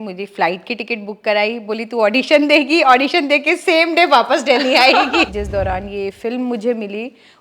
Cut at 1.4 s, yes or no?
no